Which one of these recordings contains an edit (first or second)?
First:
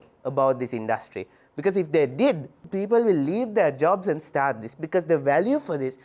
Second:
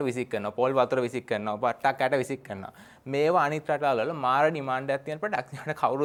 first